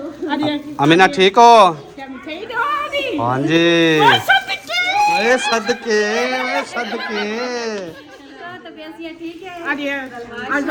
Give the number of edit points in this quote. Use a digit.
0